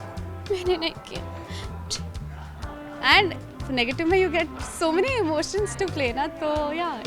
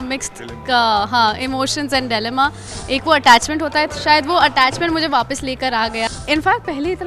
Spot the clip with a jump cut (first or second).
second